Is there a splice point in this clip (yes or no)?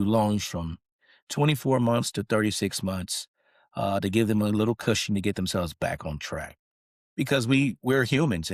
yes